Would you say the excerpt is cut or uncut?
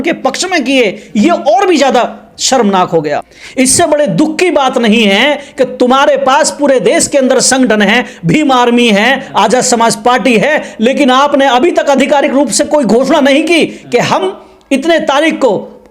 cut